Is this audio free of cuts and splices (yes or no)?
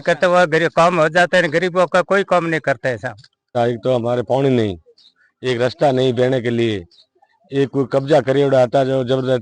no